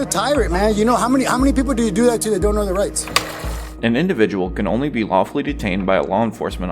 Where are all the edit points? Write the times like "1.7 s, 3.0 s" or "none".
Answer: none